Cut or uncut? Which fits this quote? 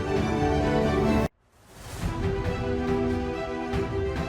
cut